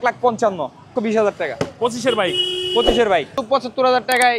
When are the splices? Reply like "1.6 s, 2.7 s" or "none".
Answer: 0.9 s, 3.4 s